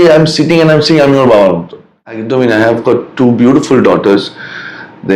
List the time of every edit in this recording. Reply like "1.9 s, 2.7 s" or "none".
2.2 s